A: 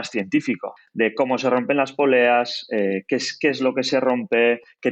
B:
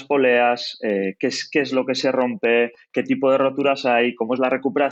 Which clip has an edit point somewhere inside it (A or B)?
A